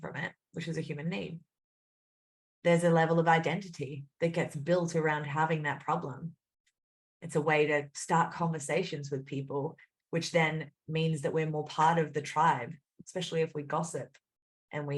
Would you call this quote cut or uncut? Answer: uncut